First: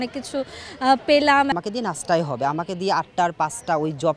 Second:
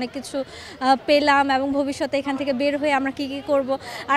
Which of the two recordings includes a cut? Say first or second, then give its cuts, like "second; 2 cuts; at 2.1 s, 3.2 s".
first; 1 cut; at 1.5 s